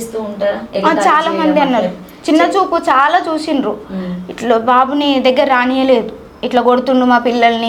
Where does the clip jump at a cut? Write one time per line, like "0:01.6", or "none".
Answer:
none